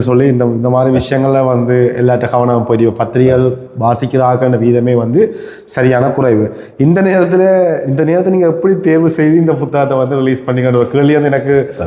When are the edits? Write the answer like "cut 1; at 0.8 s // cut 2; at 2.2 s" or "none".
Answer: none